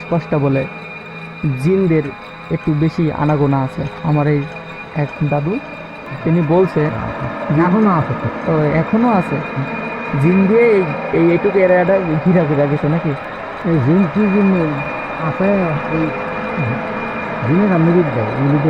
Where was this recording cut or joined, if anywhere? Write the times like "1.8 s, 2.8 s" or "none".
none